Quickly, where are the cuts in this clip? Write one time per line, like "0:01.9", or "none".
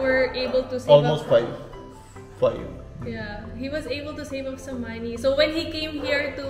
none